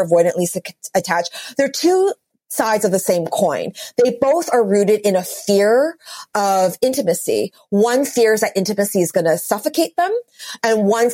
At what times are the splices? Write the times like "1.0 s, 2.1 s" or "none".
none